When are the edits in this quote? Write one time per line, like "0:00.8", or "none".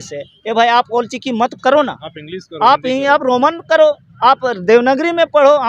none